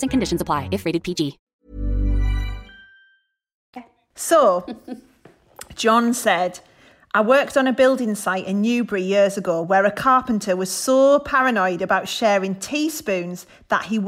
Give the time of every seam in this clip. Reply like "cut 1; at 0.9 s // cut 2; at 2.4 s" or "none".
none